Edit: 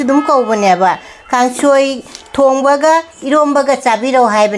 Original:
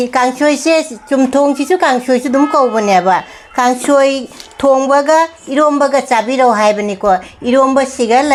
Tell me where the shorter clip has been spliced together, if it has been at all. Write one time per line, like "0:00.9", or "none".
none

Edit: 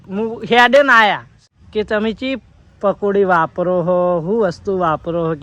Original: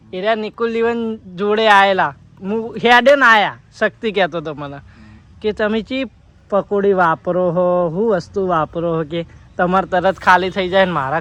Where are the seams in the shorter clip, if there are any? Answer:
0:01.3

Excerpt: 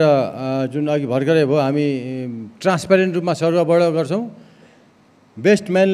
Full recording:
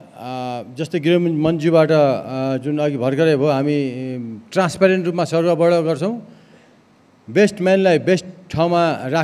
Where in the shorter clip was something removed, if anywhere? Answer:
none

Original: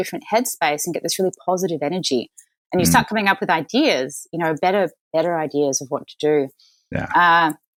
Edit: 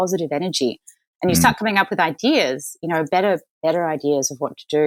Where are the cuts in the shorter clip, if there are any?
none

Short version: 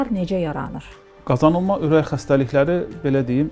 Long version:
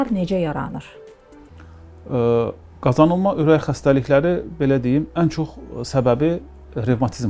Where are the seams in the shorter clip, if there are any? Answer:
0:01.1

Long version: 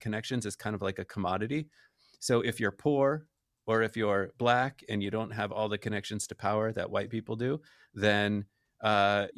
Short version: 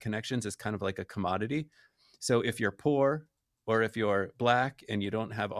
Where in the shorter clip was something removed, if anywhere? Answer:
none

